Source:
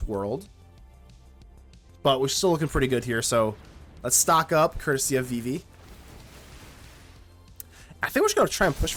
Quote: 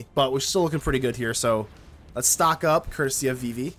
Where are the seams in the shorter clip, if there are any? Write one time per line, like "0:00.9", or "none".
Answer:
none